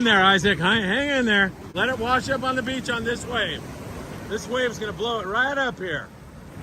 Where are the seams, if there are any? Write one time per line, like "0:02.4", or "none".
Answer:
0:01.7

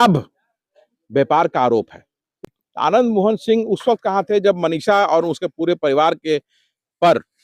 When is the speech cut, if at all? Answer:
0:02.4

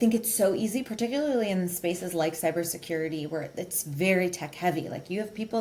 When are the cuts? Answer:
none

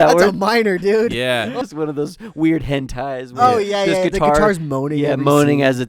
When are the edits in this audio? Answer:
0:01.6

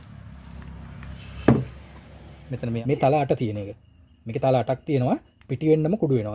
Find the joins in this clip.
0:02.8

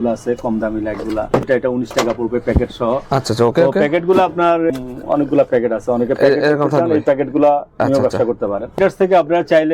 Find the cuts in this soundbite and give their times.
0:01.5
0:04.7
0:08.7

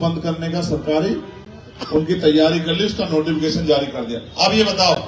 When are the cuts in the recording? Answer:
none

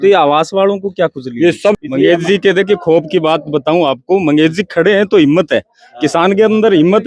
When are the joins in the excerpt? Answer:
0:01.8

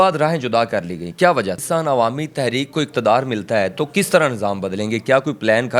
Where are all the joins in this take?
0:01.6

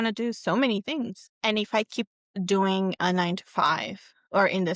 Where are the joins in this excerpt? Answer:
0:01.2

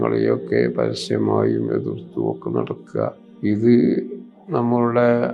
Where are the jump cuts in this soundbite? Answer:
0:03.3

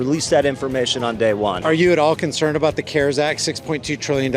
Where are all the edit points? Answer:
0:01.6

